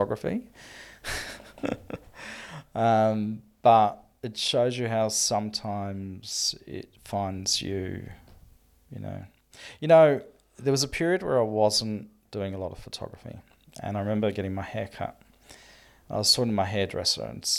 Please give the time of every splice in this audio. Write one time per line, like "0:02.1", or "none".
none